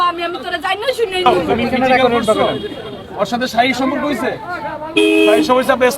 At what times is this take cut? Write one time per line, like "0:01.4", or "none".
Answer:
0:01.2